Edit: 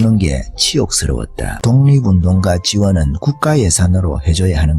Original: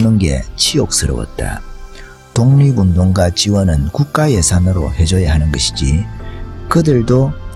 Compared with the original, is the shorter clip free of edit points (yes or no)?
no